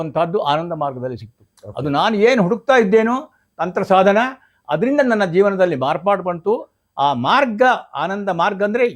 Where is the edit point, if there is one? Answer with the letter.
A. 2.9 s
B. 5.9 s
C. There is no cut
C